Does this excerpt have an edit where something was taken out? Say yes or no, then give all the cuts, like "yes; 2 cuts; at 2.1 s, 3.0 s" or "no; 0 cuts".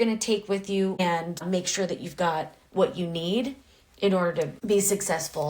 yes; 2 cuts; at 1.0 s, 4.6 s